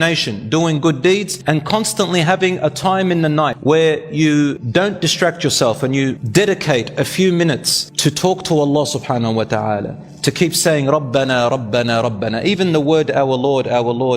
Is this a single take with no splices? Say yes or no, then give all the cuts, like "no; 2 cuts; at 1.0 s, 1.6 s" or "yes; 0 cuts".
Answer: no; 4 cuts; at 1.3 s, 3.6 s, 4.6 s, 6.2 s